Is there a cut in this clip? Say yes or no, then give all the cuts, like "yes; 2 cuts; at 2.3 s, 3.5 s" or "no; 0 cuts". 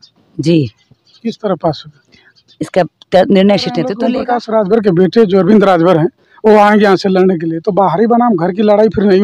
yes; 1 cut; at 4.0 s